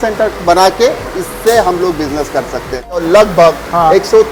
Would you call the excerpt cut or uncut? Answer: uncut